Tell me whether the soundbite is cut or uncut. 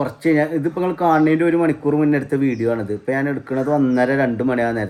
uncut